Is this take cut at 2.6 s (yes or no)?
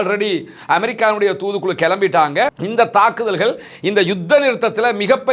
yes